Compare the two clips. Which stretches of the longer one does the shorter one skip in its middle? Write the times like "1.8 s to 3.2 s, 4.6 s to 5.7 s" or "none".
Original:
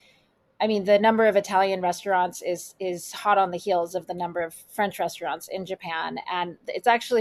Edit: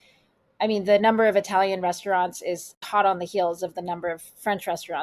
2.7 s to 3.1 s